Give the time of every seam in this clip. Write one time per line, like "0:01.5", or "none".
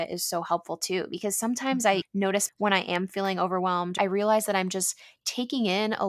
0:02.4
0:04.0